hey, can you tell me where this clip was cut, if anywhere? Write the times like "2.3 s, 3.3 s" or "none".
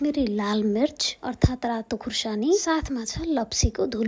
none